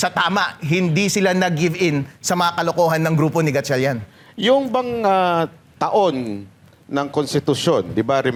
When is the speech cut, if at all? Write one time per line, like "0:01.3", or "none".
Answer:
none